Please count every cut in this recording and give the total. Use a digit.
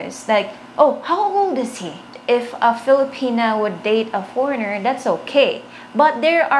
1